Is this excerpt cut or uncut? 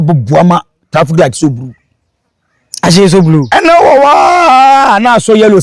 uncut